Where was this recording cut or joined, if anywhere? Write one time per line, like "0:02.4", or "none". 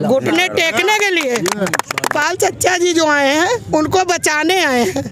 0:02.1